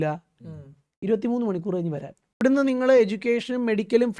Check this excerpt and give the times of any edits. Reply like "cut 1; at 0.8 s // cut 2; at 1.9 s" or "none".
cut 1; at 2.4 s

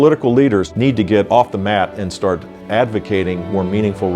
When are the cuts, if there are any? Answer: cut 1; at 1.0 s

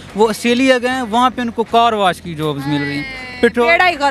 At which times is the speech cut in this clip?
cut 1; at 3.2 s

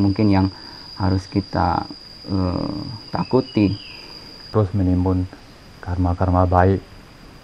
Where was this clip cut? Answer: cut 1; at 4.5 s

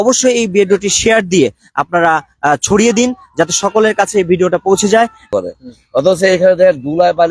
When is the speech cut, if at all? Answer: cut 1; at 5.2 s

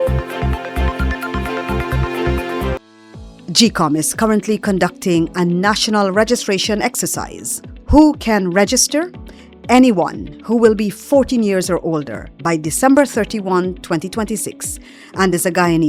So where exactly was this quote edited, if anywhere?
cut 1; at 2.8 s

